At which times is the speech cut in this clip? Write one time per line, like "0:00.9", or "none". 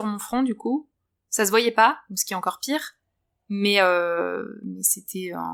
none